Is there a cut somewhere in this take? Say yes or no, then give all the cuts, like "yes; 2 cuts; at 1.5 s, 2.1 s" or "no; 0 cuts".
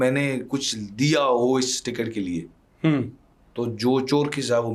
no; 0 cuts